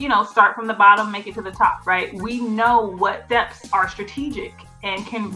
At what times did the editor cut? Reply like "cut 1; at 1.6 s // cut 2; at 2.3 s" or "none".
cut 1; at 1.8 s // cut 2; at 3.6 s